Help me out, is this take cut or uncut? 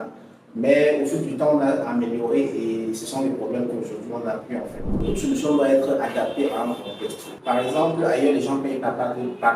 cut